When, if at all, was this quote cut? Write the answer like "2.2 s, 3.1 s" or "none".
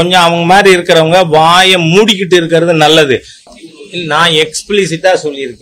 3.4 s